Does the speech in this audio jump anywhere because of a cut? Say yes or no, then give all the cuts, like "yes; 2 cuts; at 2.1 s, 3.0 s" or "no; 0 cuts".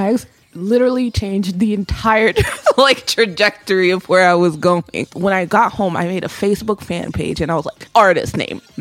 yes; 2 cuts; at 5.0 s, 7.8 s